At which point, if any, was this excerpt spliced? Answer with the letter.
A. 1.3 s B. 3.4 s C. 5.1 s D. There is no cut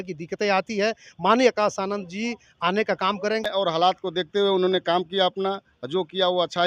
B